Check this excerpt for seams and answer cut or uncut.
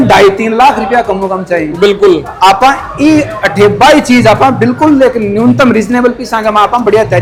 uncut